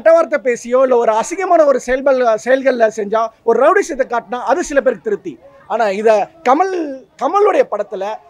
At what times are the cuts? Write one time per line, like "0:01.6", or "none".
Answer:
none